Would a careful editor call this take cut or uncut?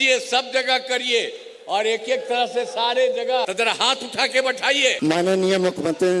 cut